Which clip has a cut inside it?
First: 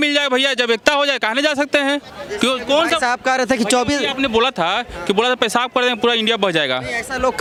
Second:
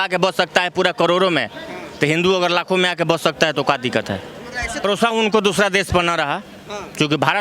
second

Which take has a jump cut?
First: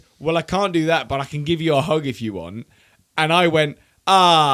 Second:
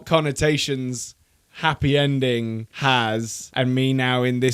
second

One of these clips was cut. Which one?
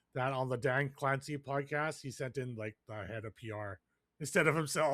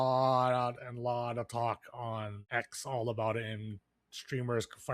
second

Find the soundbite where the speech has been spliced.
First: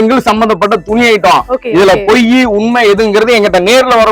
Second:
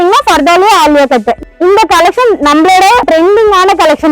second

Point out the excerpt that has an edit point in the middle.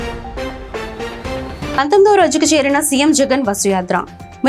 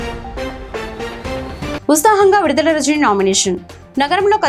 first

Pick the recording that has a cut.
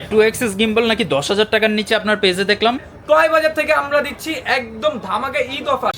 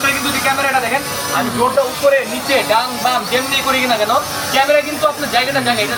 first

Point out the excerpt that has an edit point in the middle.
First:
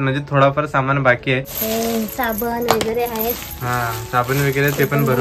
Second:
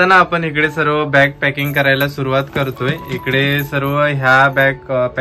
first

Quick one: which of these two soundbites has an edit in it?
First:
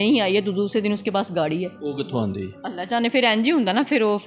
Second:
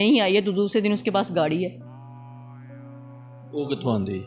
first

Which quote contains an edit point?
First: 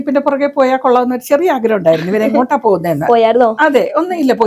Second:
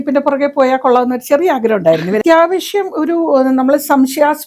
second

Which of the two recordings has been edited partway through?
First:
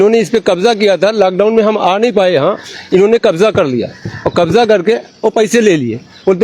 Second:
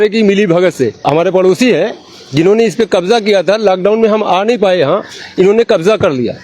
second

